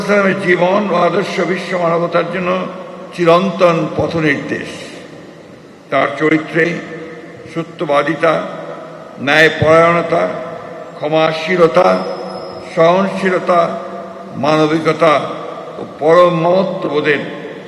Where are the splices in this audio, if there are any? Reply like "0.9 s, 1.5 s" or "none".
none